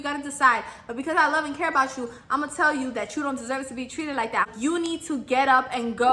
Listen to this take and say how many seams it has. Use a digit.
1